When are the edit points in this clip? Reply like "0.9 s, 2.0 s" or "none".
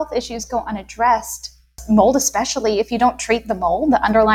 1.8 s